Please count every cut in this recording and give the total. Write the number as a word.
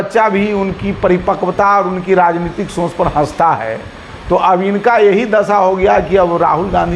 zero